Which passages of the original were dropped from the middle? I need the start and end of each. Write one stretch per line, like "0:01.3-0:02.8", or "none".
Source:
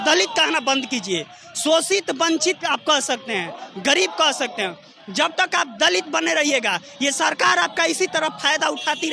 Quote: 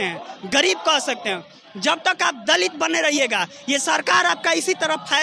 none